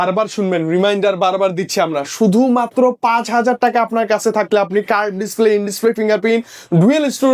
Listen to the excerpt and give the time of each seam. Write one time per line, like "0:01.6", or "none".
none